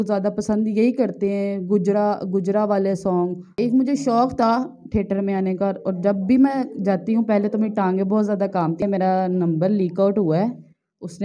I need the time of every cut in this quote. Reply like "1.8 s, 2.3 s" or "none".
3.4 s, 8.8 s